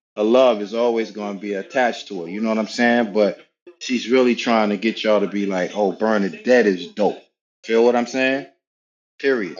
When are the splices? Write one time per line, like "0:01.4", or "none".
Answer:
none